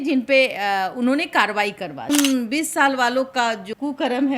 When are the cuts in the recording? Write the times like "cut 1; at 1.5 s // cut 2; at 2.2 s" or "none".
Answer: cut 1; at 2.1 s